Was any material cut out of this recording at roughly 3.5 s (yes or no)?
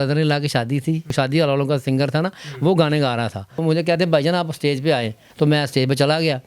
yes